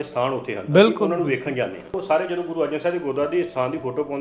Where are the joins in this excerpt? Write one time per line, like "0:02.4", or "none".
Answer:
0:02.0